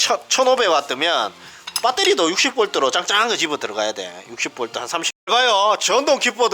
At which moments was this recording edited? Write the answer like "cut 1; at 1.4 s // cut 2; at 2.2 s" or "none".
cut 1; at 5.1 s